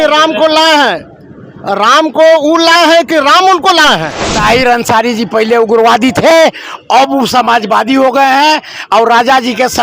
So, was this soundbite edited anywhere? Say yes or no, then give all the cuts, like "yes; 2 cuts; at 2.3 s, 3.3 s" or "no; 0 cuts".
yes; 1 cut; at 4.2 s